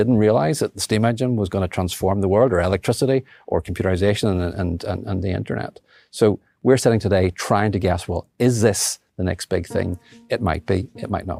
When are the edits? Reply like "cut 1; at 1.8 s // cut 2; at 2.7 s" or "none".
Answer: none